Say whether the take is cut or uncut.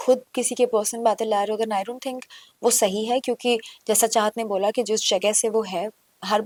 uncut